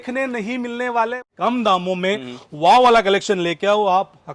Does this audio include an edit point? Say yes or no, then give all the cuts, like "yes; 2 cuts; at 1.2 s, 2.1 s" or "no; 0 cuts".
yes; 1 cut; at 1.2 s